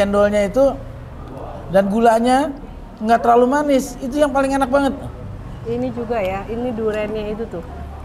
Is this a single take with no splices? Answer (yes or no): yes